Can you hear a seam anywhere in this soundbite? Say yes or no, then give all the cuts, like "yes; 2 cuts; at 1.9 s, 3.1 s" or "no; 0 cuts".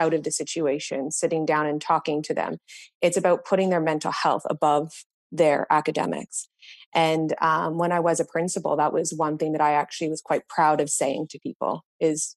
no; 0 cuts